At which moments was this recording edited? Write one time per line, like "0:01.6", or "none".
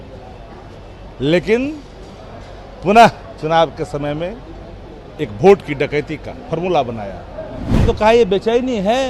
0:07.8